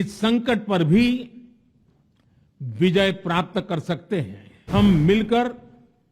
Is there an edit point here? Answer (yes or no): yes